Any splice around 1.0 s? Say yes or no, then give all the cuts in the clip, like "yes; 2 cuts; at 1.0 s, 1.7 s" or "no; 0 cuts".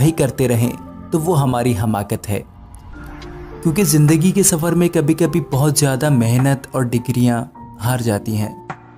no; 0 cuts